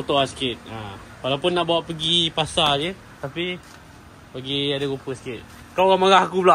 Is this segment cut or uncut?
uncut